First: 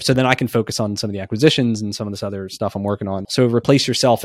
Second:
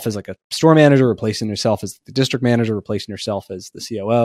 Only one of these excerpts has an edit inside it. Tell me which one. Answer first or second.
first